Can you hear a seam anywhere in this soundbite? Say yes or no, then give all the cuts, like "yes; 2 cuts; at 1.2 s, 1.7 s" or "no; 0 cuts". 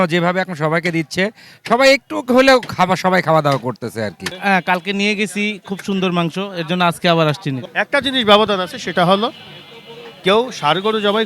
yes; 2 cuts; at 4.3 s, 7.6 s